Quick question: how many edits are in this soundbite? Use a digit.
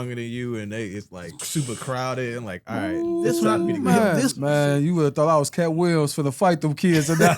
2